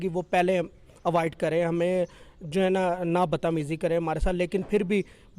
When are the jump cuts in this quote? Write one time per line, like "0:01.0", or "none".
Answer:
none